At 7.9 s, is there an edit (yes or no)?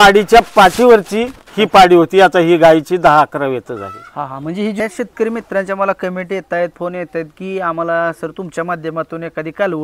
no